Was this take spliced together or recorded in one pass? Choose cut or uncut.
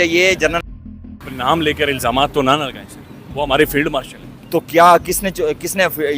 cut